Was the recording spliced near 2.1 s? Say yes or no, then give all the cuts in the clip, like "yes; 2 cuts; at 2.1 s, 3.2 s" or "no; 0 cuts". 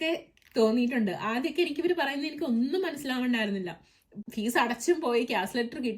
no; 1 cut; at 4.2 s